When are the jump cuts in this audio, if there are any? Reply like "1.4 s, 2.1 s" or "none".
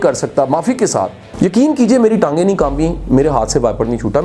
1.2 s